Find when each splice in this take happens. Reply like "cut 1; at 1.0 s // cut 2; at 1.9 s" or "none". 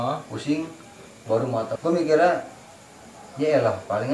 cut 1; at 1.7 s